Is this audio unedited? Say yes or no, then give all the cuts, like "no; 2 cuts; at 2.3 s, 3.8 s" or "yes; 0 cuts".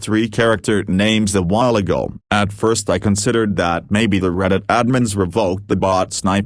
yes; 0 cuts